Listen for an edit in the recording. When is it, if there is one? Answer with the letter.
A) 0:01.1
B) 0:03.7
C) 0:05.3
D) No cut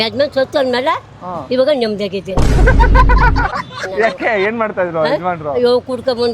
B